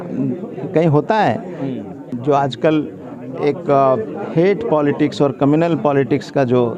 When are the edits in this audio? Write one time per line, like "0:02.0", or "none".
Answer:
0:02.0